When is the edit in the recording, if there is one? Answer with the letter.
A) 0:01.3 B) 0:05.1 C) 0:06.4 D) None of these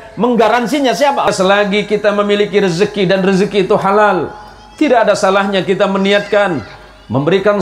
A